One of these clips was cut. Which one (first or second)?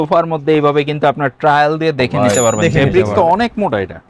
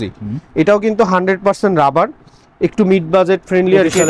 first